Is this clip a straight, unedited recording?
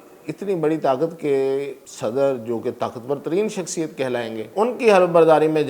no; 2 cuts; at 1.8 s, 4.5 s

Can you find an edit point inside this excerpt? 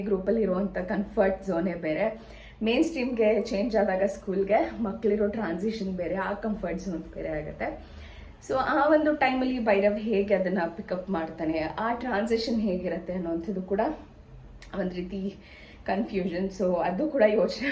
no; 0 cuts

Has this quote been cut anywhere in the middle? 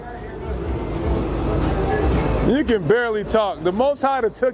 no; 0 cuts

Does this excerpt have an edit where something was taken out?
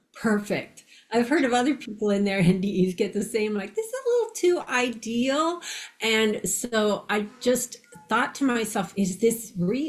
yes; 1 cut; at 8.9 s

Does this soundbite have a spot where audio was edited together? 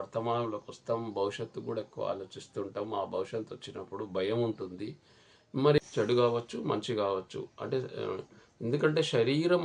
yes; 1 cut; at 5.8 s

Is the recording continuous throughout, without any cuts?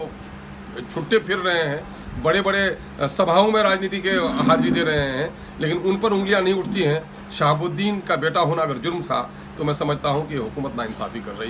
yes; 0 cuts

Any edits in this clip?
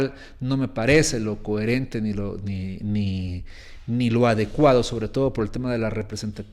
no; 0 cuts

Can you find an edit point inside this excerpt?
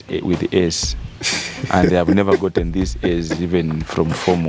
no; 0 cuts

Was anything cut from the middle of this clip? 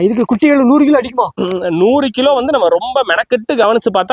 no; 0 cuts

